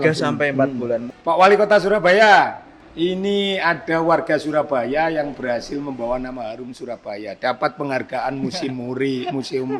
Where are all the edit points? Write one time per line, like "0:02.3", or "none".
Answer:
0:01.0